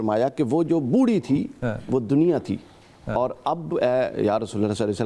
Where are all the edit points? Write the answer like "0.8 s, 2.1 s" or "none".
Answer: none